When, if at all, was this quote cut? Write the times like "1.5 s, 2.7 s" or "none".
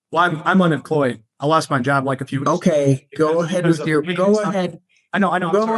1.3 s